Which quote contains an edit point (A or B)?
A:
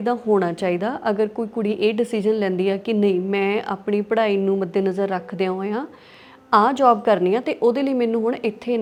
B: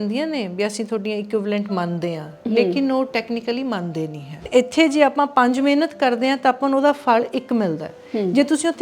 B